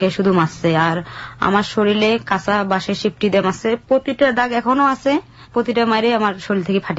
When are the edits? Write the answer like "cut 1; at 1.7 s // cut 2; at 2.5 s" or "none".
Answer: none